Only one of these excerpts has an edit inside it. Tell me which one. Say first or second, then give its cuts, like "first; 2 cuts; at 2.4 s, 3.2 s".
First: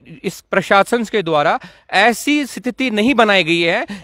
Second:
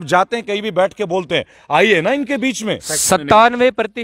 second; 1 cut; at 2.9 s